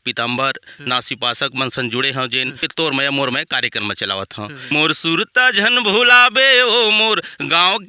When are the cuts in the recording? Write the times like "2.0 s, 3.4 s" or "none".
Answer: 2.7 s, 4.6 s